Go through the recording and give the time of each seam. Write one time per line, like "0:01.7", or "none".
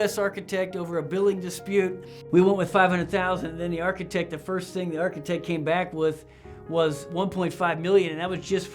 0:02.1